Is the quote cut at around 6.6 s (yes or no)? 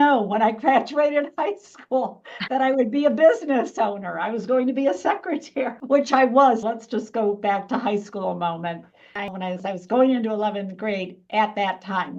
yes